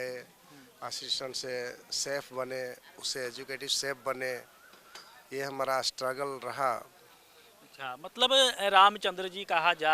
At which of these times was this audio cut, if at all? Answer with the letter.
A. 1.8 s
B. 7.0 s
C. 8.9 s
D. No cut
D